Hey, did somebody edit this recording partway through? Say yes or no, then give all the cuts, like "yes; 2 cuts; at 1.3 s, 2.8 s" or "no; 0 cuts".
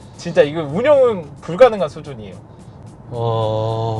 no; 0 cuts